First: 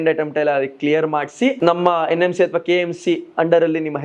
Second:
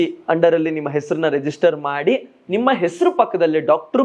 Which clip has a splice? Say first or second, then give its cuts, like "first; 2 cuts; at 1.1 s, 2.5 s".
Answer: first; 1 cut; at 1.6 s